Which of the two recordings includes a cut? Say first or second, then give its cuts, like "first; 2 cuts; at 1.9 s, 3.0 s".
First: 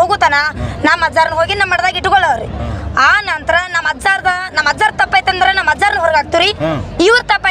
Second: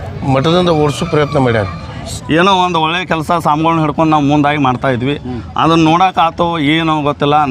second; 1 cut; at 2.1 s